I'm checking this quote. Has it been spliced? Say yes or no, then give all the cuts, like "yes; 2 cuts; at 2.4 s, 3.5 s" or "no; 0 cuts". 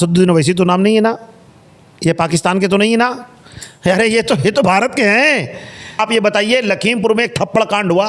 yes; 1 cut; at 6.0 s